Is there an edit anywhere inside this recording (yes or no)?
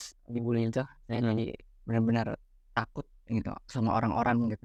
no